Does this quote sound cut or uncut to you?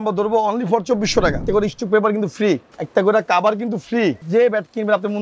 cut